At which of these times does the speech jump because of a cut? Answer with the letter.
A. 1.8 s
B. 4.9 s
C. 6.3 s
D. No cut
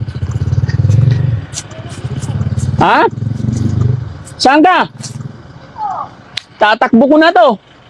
D